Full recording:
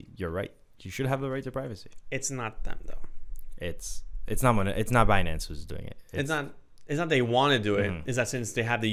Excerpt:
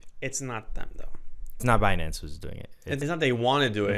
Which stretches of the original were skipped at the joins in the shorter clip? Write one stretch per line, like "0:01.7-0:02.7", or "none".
0:03.5-0:04.9
0:06.3-0:06.9